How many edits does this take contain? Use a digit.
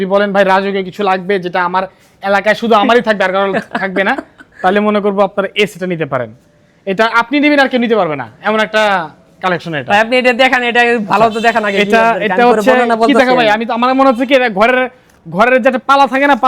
0